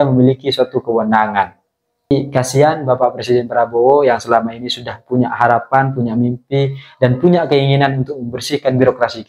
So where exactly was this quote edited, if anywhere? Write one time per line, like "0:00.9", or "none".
0:02.1